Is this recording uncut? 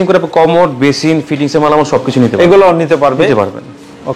yes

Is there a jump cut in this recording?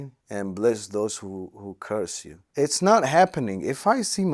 yes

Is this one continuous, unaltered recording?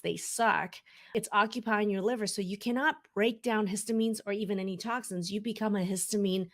no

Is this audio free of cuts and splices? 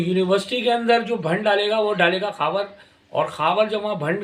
yes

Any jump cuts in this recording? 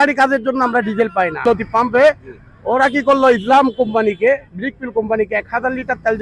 yes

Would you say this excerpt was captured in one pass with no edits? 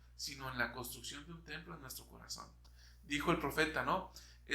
yes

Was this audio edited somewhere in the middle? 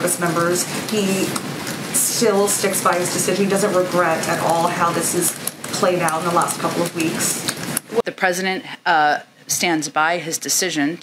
yes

